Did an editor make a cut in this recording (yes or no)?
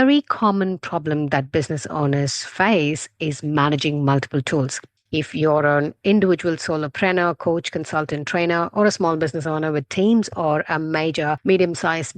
yes